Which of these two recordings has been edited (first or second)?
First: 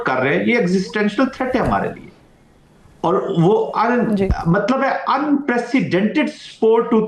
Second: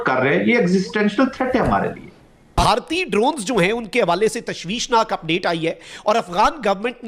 second